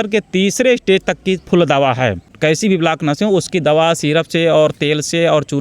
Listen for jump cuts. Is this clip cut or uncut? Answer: cut